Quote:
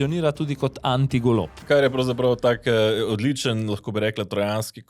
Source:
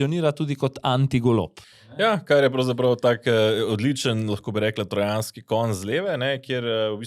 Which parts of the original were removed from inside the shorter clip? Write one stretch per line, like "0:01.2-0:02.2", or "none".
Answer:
0:01.6-0:02.2